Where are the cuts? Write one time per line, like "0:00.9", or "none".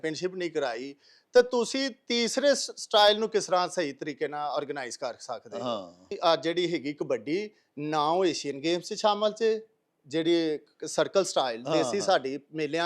0:06.2